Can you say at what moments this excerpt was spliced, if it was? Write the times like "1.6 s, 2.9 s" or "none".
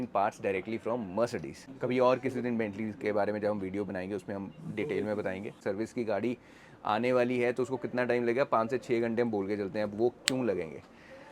1.6 s, 5.6 s